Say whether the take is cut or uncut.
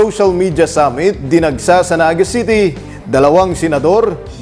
uncut